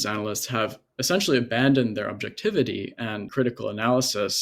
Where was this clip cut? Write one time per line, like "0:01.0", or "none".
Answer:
0:03.2

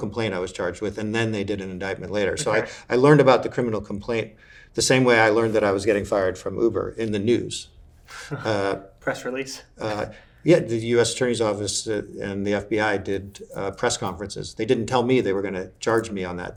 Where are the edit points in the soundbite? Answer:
none

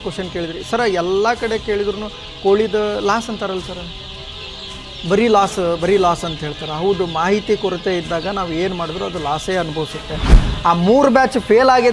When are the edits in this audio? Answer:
0:10.4

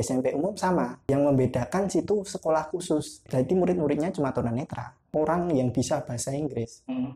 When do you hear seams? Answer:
0:01.0
0:03.2
0:05.0

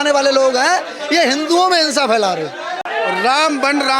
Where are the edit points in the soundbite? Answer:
0:02.9

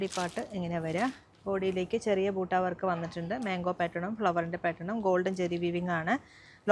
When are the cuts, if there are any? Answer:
none

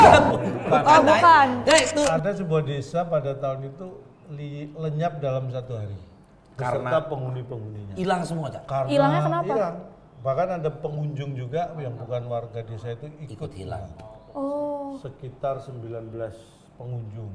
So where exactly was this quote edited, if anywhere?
0:02.1

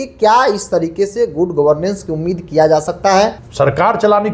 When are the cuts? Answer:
0:03.4

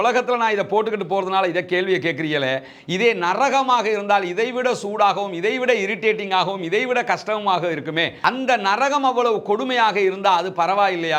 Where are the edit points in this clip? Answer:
none

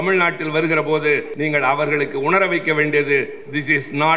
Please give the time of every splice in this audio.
0:01.3

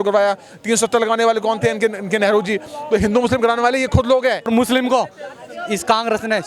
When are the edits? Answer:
0:04.5

